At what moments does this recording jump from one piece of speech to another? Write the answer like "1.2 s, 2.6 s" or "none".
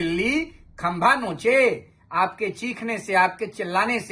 none